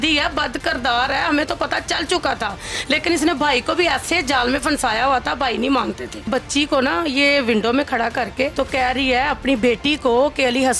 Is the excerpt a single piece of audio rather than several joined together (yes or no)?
no